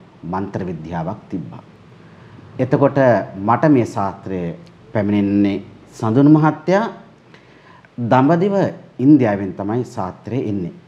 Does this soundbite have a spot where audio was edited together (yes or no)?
no